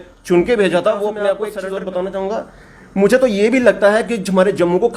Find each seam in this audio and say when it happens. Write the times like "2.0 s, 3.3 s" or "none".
1.4 s